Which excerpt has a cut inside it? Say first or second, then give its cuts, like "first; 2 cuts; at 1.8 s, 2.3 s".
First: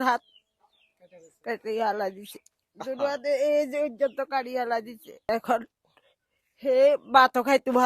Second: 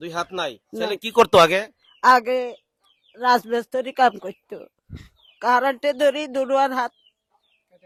first; 1 cut; at 5.3 s